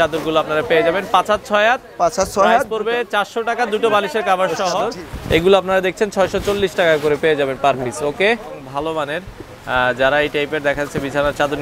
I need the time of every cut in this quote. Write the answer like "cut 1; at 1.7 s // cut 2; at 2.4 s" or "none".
cut 1; at 4.9 s // cut 2; at 8.5 s